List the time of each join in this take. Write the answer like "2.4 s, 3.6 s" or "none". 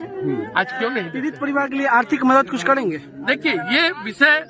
1.3 s